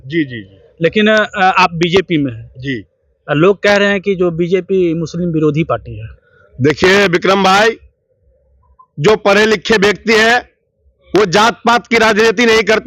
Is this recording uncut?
yes; 0 cuts

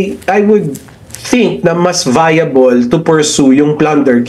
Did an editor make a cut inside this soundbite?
no; 0 cuts

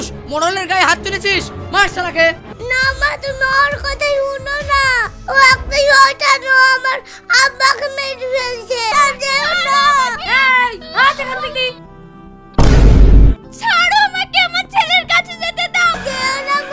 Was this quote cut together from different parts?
yes; 3 cuts; at 2.5 s, 8.9 s, 16.0 s

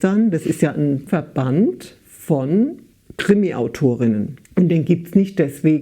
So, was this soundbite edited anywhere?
yes; 2 cuts; at 1.1 s, 4.4 s

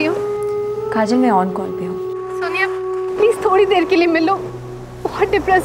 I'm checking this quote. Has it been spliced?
yes; 2 cuts; at 1.6 s, 3.2 s

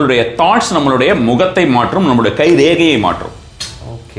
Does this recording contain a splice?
no; 0 cuts

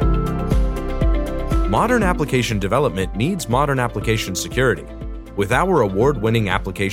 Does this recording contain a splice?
no; 0 cuts

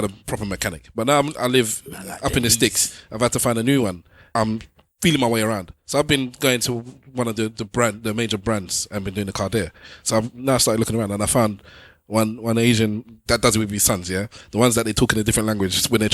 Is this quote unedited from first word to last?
no; 3 cuts; at 4.2 s, 9.8 s, 13.2 s

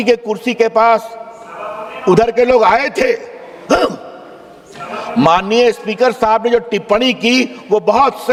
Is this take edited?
no; 0 cuts

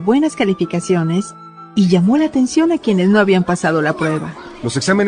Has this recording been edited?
no; 0 cuts

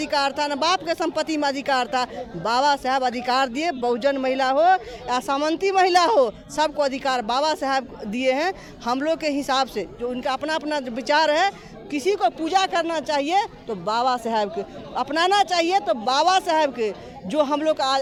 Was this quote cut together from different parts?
no; 0 cuts

